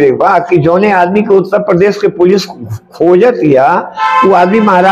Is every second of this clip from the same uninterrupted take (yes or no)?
yes